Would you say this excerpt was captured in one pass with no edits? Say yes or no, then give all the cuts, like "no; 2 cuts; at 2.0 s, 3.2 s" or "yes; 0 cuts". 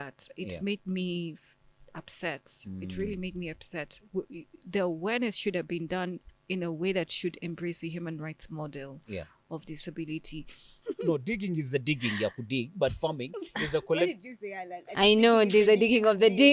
no; 1 cut; at 10.8 s